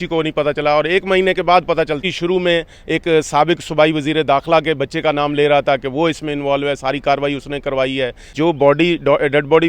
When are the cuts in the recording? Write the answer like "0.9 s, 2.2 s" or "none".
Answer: 2.0 s, 8.2 s